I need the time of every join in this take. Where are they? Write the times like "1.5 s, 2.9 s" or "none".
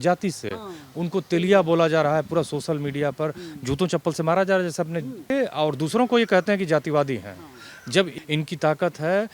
5.3 s, 8.1 s